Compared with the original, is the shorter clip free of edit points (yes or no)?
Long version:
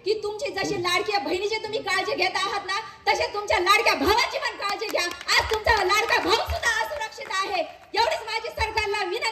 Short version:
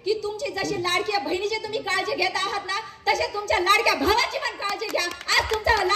yes